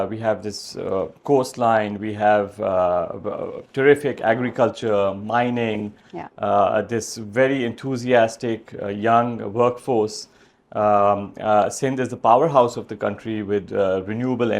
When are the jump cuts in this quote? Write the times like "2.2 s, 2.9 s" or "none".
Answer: none